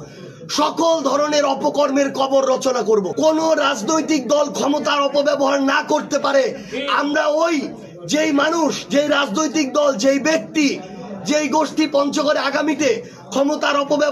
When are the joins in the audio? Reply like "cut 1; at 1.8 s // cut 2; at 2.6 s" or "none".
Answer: cut 1; at 3.1 s

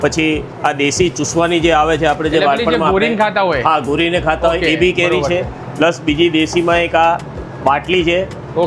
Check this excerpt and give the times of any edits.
none

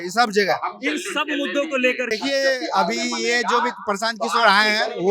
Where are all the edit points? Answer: cut 1; at 2.2 s

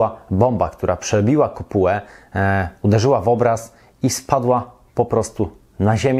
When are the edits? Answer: none

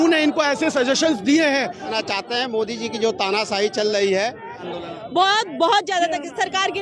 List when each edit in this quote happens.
cut 1; at 1.9 s // cut 2; at 4.7 s

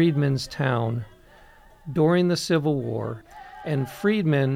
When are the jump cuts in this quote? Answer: cut 1; at 3.2 s

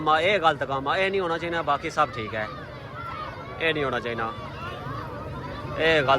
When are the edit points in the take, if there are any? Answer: none

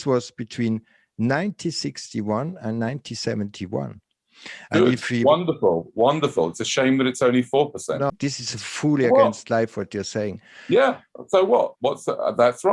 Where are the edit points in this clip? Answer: cut 1; at 8.1 s

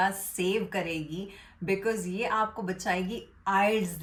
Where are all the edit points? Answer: none

